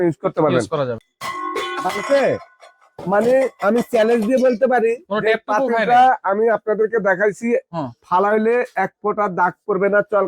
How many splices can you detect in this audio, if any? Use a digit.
1